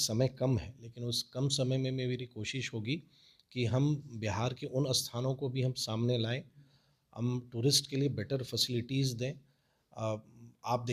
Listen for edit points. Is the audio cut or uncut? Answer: uncut